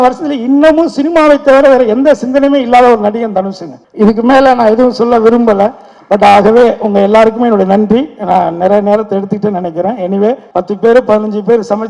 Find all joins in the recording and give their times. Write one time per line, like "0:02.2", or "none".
0:10.5